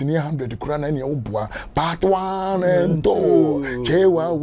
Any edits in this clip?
no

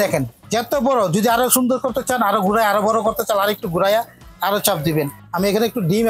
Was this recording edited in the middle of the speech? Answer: yes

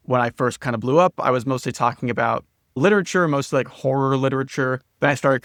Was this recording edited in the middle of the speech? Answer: no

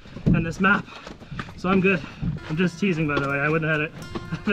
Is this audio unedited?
no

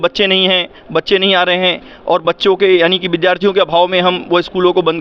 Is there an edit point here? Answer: no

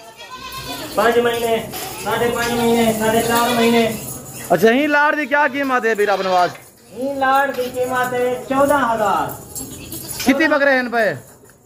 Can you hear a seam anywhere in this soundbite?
no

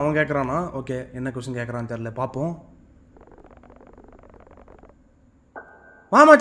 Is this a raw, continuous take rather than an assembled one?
yes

